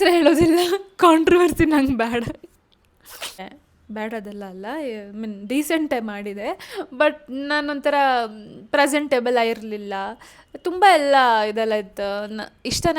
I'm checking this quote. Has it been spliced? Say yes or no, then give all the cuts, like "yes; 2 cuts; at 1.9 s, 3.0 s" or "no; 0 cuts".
yes; 1 cut; at 3.4 s